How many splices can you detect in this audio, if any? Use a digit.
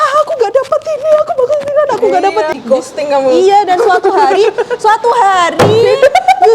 1